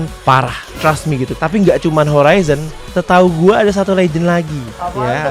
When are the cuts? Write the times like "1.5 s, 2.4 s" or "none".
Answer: 1.3 s